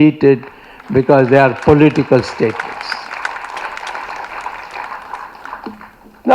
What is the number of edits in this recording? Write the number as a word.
zero